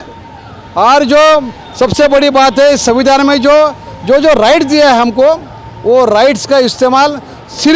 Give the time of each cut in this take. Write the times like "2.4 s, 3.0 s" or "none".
none